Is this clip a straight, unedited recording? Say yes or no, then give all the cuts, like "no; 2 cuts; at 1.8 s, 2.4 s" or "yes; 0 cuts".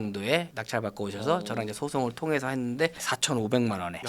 no; 1 cut; at 2.9 s